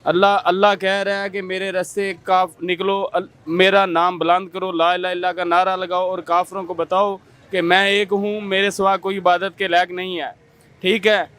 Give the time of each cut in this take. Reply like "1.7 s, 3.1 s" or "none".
none